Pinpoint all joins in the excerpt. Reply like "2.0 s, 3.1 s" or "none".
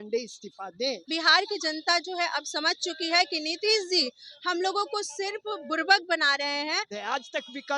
1.1 s, 6.9 s